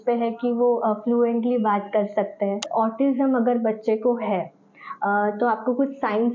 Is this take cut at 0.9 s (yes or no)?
no